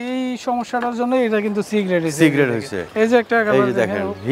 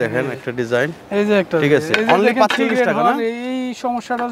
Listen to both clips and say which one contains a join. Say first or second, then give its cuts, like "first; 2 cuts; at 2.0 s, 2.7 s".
first; 1 cut; at 2.8 s